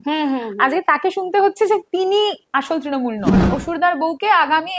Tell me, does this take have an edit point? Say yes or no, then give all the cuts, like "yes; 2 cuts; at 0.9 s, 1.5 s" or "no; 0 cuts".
yes; 1 cut; at 3.3 s